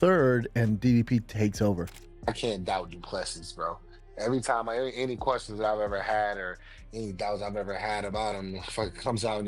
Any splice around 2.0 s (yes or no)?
yes